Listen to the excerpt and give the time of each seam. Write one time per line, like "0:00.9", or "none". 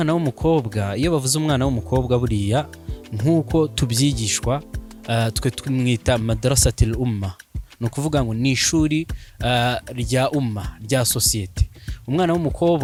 none